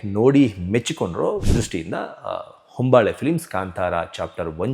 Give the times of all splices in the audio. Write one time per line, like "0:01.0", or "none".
0:01.4